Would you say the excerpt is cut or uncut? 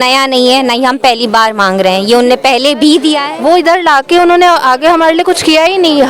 cut